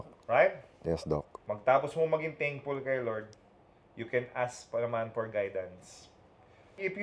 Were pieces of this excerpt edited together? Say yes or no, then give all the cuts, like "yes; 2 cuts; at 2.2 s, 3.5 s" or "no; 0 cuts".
no; 0 cuts